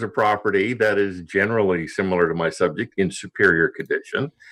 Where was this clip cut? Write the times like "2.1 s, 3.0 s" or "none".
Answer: none